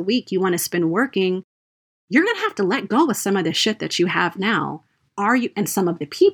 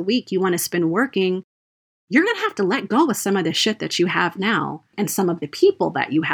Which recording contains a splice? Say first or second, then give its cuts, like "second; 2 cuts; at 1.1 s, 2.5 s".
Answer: second; 1 cut; at 4.9 s